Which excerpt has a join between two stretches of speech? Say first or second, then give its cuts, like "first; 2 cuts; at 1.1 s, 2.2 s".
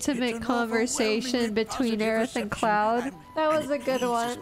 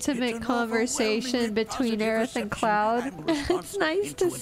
second; 1 cut; at 3.1 s